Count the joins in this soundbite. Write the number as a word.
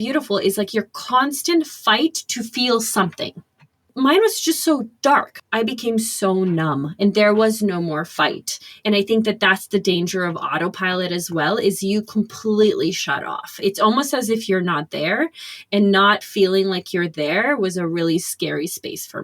two